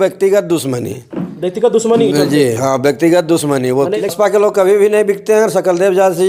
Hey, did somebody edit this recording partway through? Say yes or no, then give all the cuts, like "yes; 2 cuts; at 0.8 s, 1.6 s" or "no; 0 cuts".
yes; 1 cut; at 4.0 s